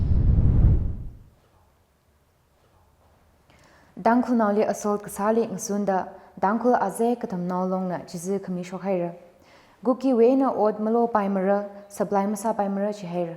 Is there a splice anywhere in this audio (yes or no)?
yes